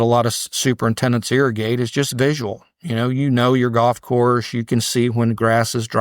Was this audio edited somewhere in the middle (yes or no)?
no